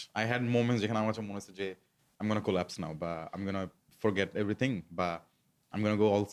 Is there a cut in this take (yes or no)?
no